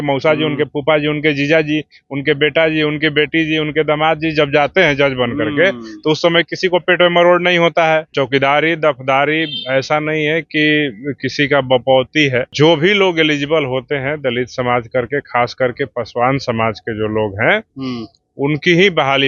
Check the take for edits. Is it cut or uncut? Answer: cut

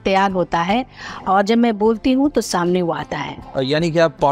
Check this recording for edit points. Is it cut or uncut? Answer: uncut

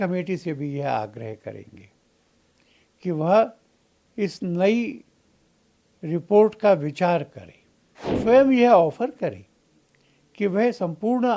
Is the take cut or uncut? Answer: cut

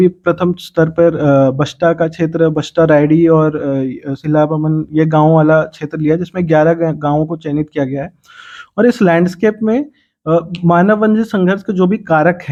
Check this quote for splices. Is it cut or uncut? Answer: uncut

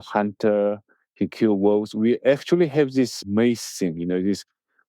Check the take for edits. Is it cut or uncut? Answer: cut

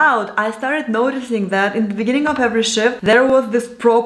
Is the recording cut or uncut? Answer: uncut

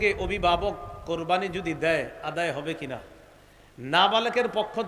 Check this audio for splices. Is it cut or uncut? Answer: uncut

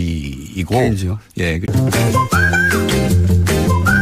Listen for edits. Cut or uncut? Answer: uncut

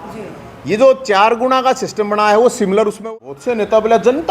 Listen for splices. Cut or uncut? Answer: cut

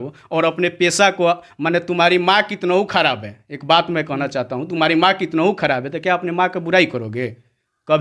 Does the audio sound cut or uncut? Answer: uncut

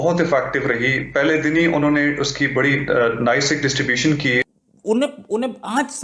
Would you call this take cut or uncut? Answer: cut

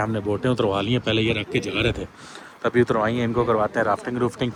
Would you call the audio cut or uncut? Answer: uncut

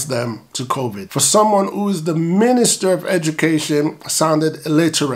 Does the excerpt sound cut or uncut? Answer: cut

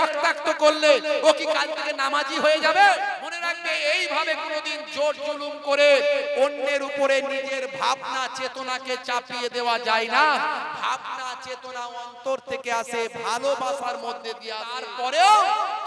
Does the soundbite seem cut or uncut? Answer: cut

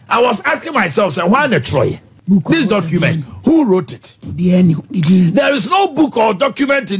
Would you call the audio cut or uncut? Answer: cut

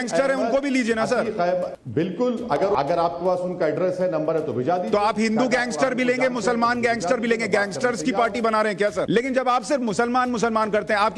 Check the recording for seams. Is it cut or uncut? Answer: cut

